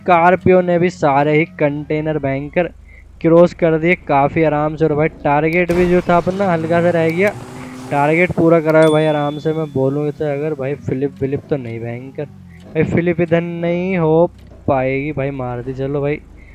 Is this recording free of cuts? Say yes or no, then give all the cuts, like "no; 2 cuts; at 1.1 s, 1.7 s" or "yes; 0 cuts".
yes; 0 cuts